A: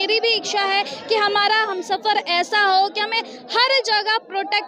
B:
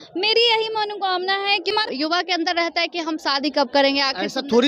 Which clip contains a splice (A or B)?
B